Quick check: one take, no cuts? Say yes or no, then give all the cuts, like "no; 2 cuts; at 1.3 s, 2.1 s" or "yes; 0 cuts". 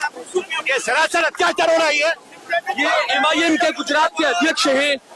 yes; 0 cuts